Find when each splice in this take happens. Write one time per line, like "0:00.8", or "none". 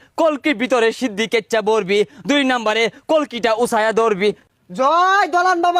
0:04.4